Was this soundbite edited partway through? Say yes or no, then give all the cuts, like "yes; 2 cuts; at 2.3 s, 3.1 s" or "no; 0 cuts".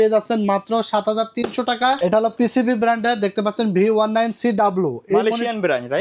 yes; 1 cut; at 2.0 s